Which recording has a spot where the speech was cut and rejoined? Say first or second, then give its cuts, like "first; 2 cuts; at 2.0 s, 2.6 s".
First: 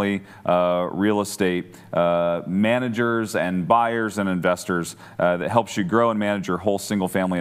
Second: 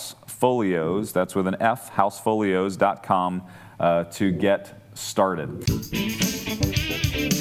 second; 1 cut; at 5.5 s